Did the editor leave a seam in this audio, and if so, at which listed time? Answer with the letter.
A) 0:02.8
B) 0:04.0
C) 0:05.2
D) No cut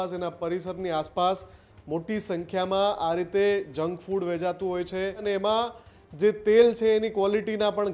C